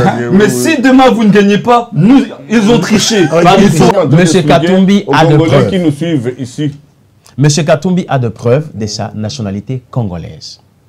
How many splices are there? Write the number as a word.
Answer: one